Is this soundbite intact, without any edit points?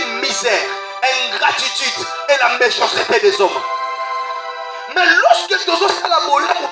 yes; 0 cuts

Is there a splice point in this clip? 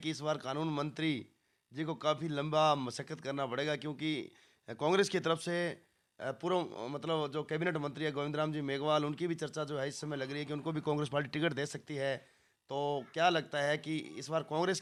no; 0 cuts

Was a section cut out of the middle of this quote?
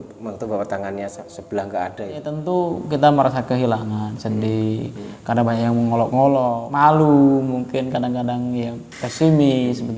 yes; 2 cuts; at 2.2 s, 6.6 s

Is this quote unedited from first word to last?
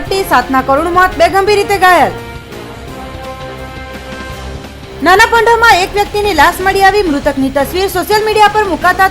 yes; 0 cuts

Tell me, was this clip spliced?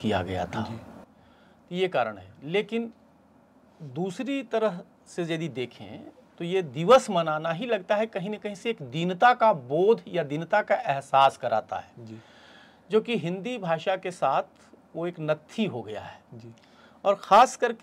no; 0 cuts

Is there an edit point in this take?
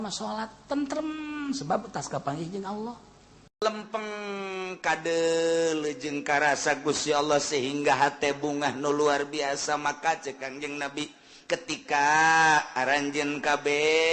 yes; 1 cut; at 3.6 s

